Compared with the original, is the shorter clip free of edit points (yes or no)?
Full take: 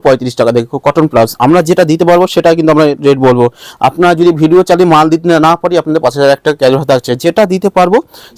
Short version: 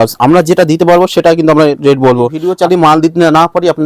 no